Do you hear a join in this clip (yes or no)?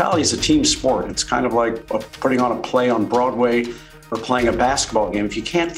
no